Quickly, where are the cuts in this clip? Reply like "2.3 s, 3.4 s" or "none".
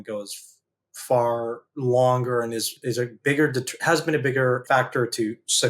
1.7 s, 2.7 s, 4.6 s